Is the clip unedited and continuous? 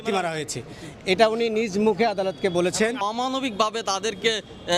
no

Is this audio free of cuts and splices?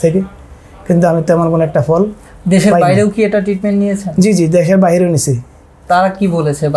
yes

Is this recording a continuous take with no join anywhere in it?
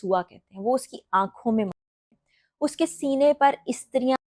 yes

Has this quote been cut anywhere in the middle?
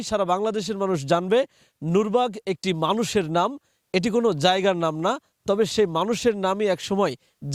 no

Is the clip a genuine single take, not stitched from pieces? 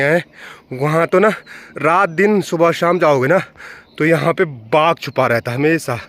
yes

